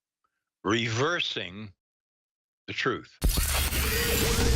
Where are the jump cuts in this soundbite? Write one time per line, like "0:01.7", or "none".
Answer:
0:03.1